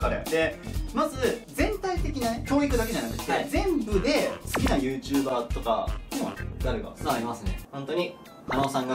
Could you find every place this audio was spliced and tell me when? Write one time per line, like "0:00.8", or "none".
0:07.5